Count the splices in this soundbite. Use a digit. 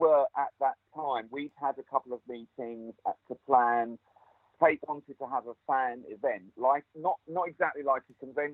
0